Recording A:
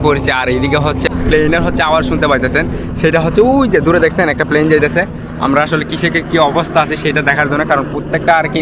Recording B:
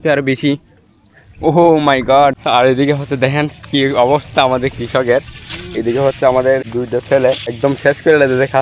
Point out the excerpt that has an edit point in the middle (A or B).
B